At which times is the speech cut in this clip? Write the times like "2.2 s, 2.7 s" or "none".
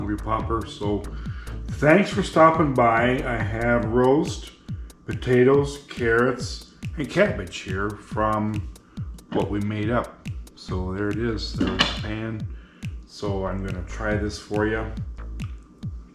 14.9 s